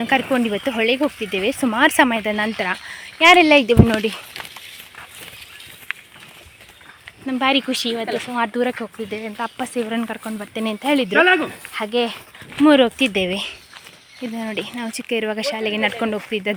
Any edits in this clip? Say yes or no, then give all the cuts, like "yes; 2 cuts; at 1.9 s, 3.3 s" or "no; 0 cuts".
no; 0 cuts